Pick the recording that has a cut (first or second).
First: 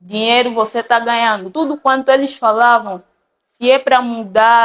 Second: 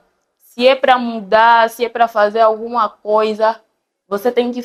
first